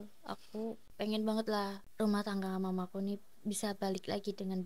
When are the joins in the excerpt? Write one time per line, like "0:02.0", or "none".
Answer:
0:00.8
0:01.8